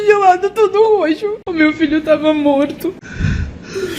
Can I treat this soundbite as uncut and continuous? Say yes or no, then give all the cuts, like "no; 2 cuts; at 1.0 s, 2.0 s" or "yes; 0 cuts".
no; 2 cuts; at 1.4 s, 3.1 s